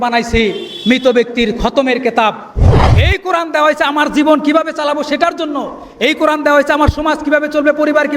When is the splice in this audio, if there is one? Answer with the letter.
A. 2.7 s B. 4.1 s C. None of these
A